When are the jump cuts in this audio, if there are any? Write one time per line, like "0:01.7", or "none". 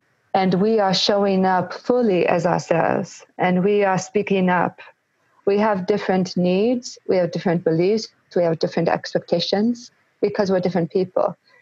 0:05.2